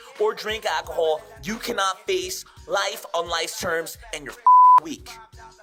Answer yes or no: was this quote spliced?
no